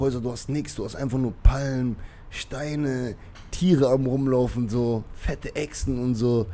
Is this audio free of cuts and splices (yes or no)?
yes